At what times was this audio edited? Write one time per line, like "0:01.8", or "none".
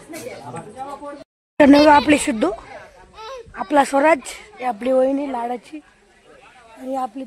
0:01.2